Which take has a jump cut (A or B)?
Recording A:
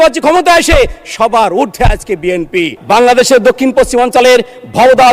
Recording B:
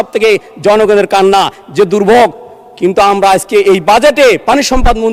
A